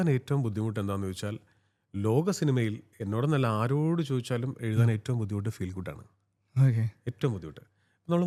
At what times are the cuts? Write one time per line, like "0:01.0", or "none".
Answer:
none